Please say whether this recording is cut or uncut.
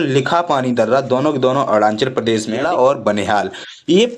cut